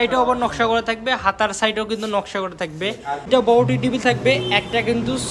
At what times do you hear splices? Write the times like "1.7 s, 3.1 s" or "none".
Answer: 3.3 s